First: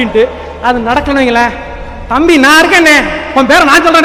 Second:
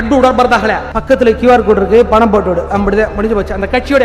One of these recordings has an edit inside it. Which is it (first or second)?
second